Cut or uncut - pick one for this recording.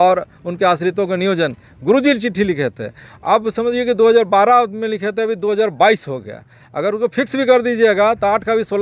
uncut